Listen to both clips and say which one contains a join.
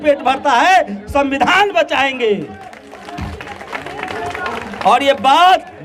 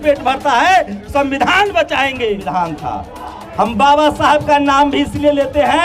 second; 1 cut; at 2.4 s

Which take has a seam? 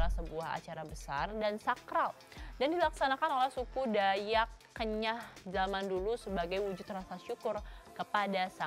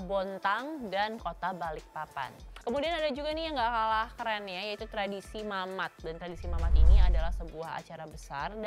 second; 1 cut; at 2.4 s

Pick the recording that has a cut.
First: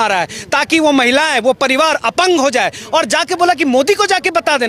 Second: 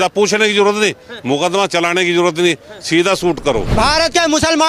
second; 1 cut; at 3.7 s

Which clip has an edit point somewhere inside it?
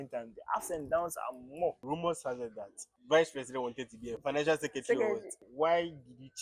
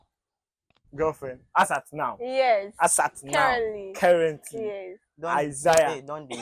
first; 4 cuts; at 1.8 s, 2.9 s, 4.2 s, 5.4 s

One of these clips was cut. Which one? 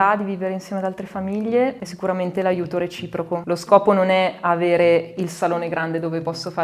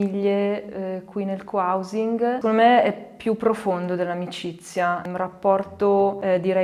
first; 2 cuts; at 1.8 s, 3.4 s

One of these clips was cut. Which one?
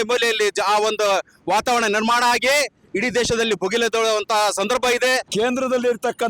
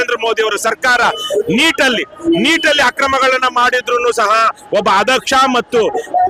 first; 1 cut; at 5.3 s

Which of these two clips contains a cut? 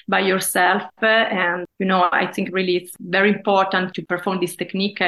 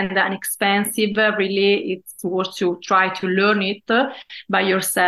first; 3 cuts; at 1.6 s, 2.9 s, 3.9 s

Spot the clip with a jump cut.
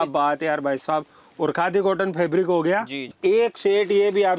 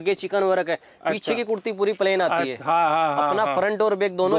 first; 1 cut; at 3.1 s

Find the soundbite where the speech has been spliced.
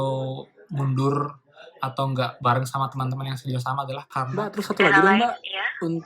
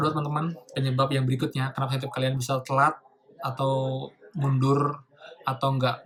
first; 1 cut; at 4.4 s

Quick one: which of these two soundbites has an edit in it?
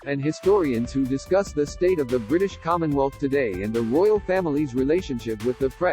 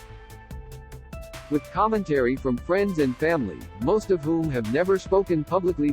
second; 1 cut; at 1.0 s

